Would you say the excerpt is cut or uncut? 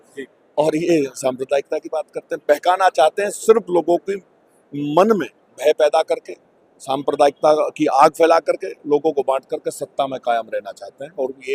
uncut